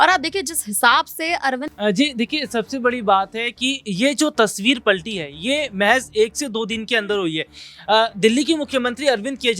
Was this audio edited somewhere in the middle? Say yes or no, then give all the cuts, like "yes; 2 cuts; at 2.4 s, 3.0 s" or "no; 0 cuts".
yes; 1 cut; at 1.6 s